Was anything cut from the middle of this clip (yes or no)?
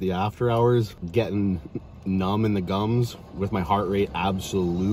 yes